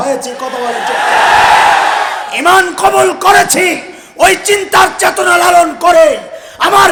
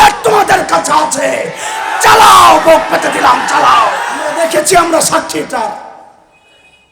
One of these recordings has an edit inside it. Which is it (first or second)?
second